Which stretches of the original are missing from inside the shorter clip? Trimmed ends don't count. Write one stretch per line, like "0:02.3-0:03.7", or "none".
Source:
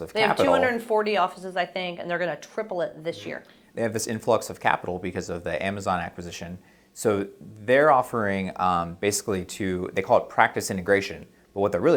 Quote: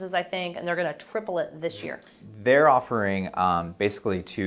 0:03.6-0:07.4